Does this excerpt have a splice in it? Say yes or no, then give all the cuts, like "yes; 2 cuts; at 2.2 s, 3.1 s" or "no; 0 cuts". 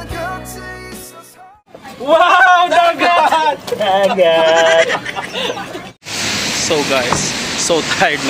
no; 0 cuts